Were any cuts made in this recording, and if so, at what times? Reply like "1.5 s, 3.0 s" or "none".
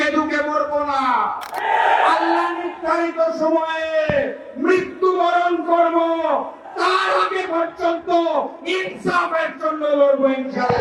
none